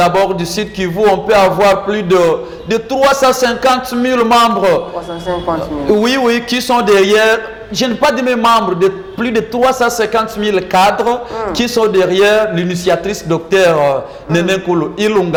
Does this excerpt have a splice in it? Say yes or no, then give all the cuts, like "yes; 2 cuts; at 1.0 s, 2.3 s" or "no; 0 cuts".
no; 0 cuts